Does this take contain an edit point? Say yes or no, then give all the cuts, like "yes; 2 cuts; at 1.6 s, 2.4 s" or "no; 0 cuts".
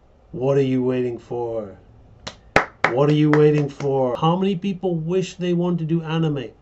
yes; 1 cut; at 4.2 s